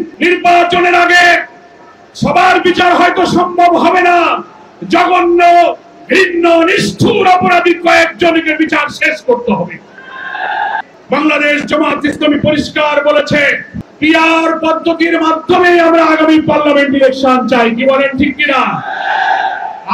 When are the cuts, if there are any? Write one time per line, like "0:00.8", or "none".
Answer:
0:10.9